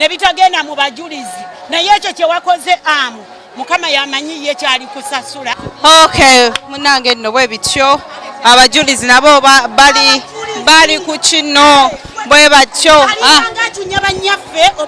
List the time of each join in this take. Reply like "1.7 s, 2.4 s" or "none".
none

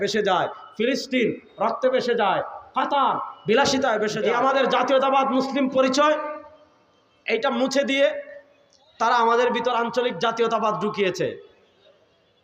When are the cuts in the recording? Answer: 4.2 s

